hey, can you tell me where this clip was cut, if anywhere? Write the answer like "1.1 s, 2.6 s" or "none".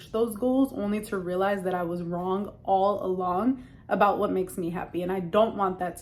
none